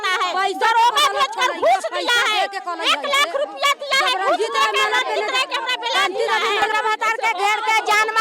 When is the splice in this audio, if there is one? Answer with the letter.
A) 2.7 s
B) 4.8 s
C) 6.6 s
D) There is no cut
C